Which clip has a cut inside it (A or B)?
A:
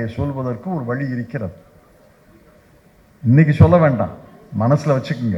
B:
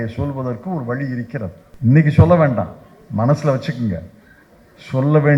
B